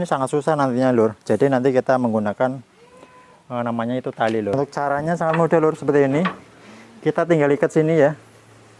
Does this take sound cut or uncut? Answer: cut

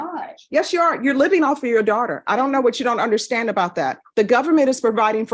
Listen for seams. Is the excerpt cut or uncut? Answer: cut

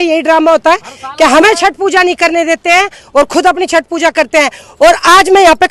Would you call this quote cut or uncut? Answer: uncut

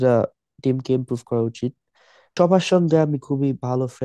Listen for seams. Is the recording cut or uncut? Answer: cut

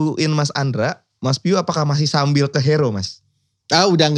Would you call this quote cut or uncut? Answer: uncut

